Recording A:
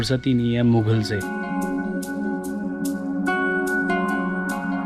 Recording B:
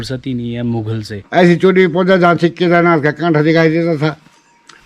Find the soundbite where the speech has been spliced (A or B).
B